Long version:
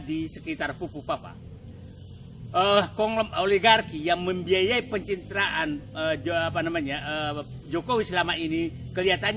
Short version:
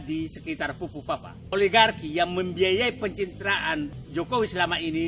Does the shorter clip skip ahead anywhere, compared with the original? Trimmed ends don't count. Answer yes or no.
yes